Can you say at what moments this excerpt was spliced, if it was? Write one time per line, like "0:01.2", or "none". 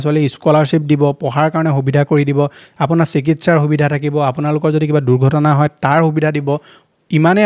none